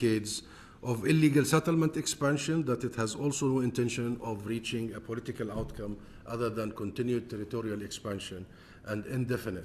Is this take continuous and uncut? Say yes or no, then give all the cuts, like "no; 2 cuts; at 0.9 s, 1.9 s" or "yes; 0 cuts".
yes; 0 cuts